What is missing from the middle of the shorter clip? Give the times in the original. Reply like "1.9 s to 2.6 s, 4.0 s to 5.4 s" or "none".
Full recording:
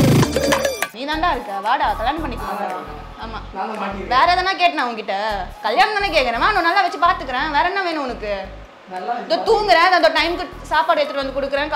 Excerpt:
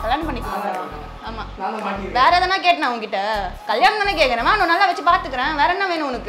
none